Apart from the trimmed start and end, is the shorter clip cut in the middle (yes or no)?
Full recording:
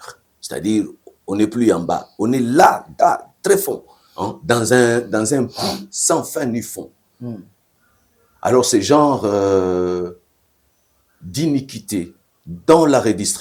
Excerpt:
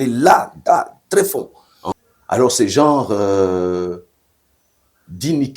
yes